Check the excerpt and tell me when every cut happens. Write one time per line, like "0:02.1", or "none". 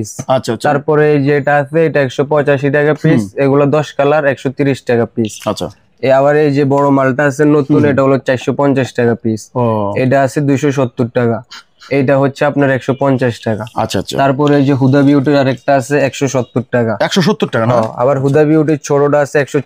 none